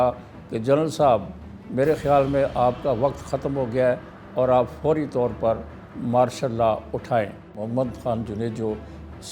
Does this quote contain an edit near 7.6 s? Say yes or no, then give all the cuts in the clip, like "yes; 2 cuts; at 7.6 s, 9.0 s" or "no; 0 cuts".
yes; 1 cut; at 7.6 s